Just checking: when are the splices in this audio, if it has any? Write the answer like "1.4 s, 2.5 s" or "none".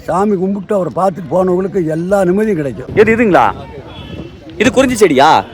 2.8 s